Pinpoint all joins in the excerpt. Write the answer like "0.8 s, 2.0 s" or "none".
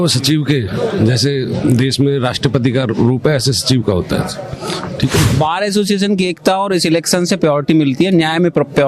5.3 s